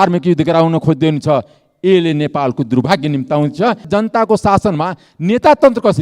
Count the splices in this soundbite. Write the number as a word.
one